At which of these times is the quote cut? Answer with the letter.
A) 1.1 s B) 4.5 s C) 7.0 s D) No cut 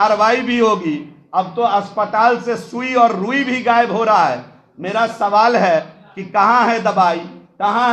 D